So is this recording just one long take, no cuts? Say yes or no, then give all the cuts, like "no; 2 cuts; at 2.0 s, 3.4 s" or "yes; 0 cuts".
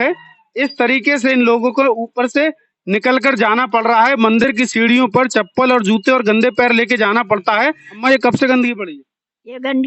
no; 1 cut; at 7.7 s